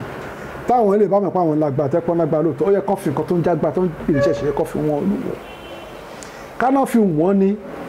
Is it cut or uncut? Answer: uncut